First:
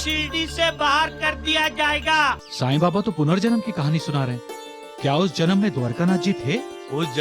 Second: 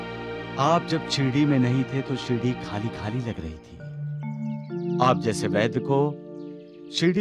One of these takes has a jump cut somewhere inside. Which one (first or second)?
first